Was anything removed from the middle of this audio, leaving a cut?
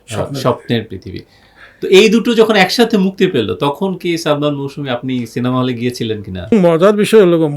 yes; 1 cut; at 6.5 s

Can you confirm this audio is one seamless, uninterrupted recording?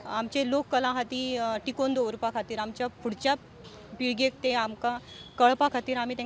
yes; 0 cuts

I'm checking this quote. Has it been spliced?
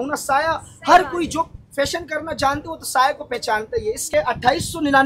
no; 0 cuts

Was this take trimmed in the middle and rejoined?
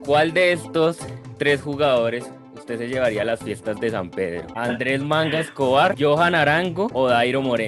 yes; 3 cuts; at 4.5 s, 6.0 s, 6.9 s

